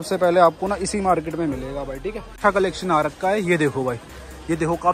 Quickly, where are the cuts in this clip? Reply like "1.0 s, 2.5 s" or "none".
2.4 s